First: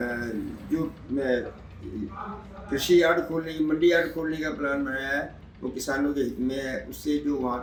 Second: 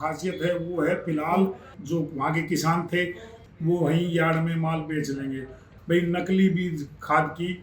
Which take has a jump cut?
second; 3 cuts; at 1.7 s, 3.3 s, 5.7 s

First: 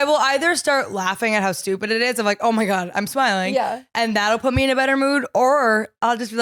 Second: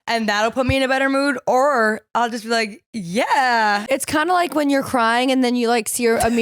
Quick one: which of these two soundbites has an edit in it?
second; 1 cut; at 3.9 s

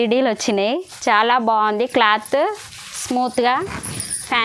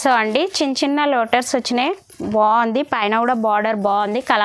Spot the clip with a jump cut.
first; 1 cut; at 0.9 s

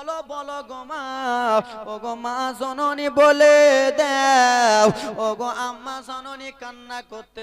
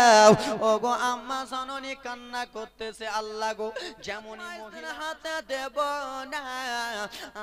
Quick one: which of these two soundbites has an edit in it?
second; 1 cut; at 4.7 s

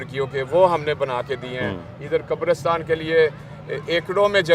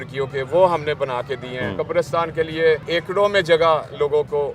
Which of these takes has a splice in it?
second; 2 cuts; at 1.8 s, 2.8 s

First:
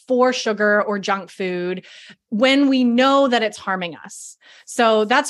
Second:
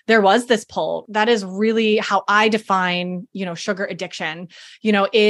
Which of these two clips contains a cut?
second; 1 cut; at 1.0 s

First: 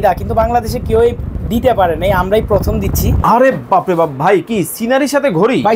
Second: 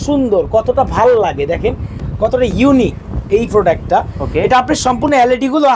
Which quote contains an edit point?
first; 1 cut; at 3.1 s

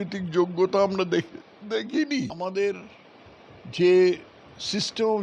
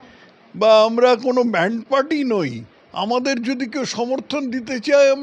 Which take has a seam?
first; 1 cut; at 2.3 s

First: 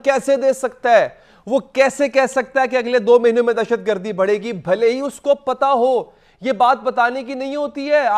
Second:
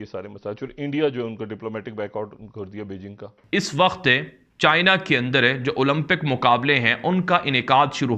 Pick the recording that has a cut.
second; 1 cut; at 3.3 s

